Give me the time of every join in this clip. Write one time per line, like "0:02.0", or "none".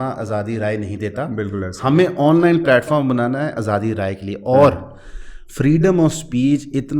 none